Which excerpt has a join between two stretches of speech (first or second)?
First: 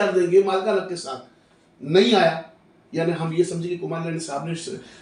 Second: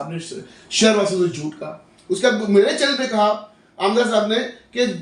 second